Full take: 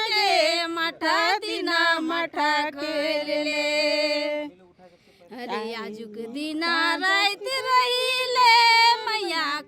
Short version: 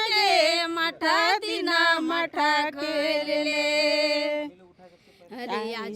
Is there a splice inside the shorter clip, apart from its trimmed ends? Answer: no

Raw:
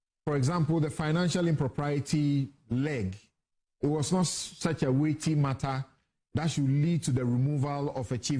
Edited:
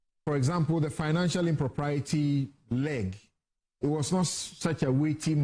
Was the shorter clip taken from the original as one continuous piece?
yes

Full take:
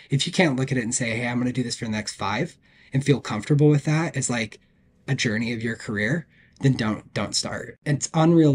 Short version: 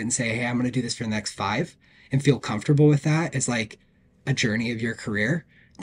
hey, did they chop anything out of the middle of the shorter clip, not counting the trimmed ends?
no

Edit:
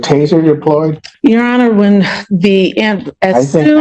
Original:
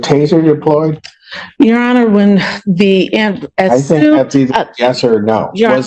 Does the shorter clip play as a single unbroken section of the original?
no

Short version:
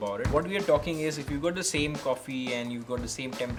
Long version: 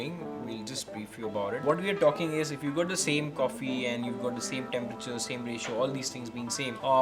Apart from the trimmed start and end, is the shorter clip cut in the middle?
no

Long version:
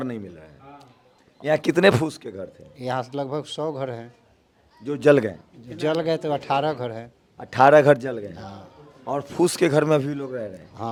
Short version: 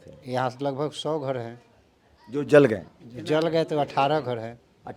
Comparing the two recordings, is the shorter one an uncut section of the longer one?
yes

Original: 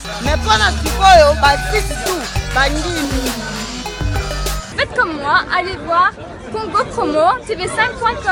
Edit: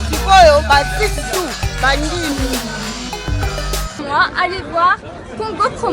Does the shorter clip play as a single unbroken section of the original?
no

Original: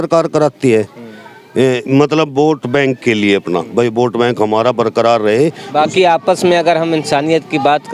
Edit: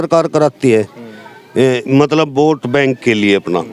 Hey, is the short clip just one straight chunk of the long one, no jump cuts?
yes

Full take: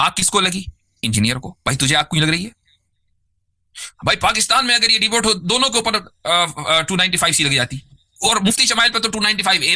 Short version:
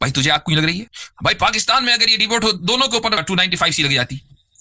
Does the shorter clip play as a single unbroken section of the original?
no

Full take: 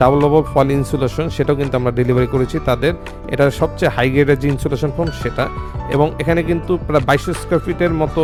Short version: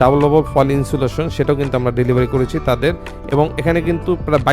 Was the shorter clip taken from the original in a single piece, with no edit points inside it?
no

